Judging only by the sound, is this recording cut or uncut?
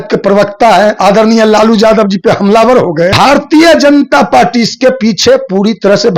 cut